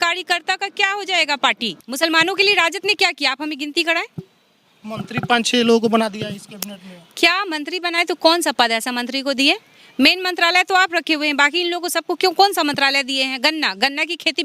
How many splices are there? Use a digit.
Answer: 1